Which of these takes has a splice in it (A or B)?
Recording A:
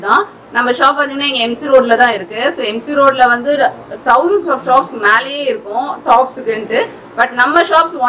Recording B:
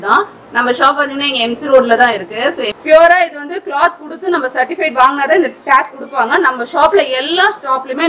B